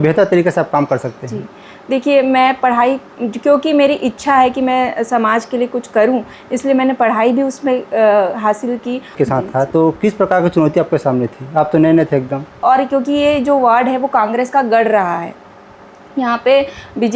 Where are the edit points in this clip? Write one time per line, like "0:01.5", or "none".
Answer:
0:09.1
0:12.6